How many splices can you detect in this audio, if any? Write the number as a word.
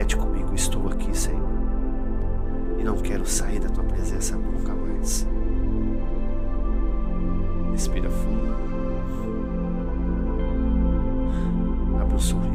zero